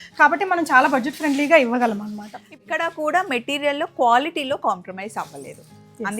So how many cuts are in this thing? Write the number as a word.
one